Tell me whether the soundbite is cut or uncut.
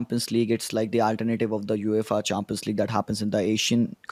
uncut